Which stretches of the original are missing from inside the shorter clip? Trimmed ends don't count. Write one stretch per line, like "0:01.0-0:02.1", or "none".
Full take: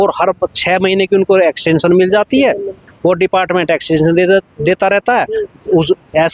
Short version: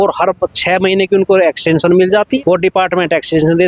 0:02.4-0:03.0